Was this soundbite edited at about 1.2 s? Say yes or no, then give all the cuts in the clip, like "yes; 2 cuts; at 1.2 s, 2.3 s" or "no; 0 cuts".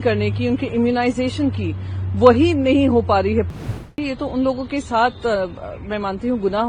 no; 1 cut; at 3.8 s